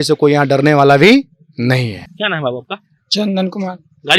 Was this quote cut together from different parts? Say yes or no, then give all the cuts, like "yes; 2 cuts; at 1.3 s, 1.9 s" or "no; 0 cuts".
no; 0 cuts